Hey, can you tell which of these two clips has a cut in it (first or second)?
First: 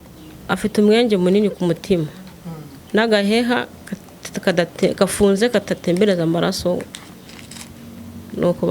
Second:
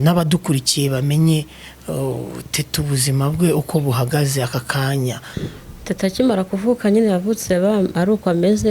second